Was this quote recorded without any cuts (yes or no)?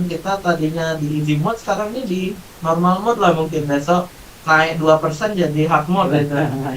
yes